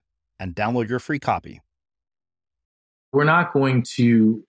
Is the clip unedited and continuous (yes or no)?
no